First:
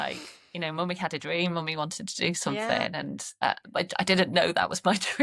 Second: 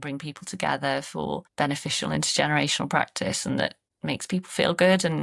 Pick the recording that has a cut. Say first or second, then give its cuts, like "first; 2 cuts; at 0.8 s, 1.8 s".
first; 1 cut; at 3.4 s